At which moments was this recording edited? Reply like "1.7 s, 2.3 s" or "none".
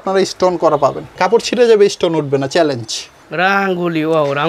1.1 s, 3.2 s